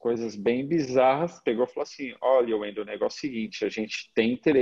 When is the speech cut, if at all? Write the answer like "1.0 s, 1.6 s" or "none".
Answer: 1.4 s

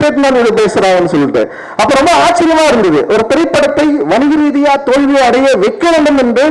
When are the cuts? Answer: none

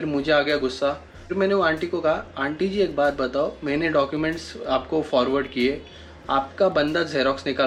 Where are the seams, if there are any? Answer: none

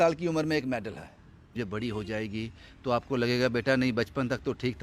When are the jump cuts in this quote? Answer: 1.5 s

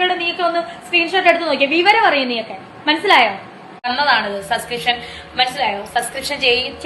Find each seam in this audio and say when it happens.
3.7 s

